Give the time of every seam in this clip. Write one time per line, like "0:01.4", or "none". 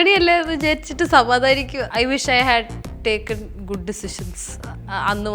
0:01.8